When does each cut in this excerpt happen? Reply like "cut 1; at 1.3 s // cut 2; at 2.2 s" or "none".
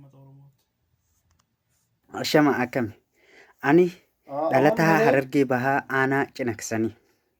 cut 1; at 1.9 s